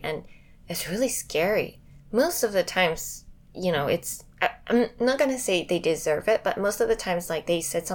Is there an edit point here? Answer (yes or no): no